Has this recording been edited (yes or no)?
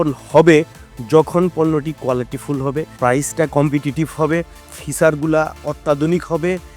yes